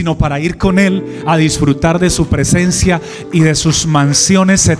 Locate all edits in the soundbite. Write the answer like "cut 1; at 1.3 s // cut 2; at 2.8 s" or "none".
none